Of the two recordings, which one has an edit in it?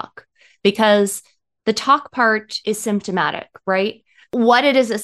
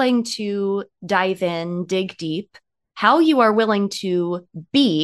first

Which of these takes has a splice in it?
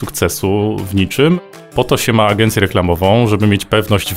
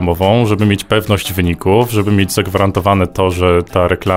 first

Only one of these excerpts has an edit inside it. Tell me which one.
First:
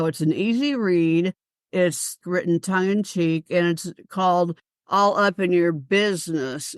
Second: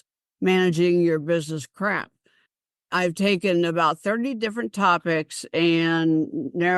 first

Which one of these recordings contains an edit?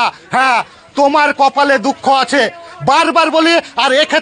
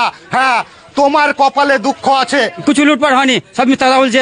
second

